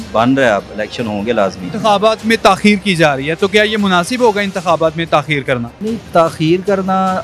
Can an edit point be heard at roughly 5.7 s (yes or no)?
yes